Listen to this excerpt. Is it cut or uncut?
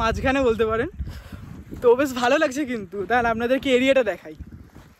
uncut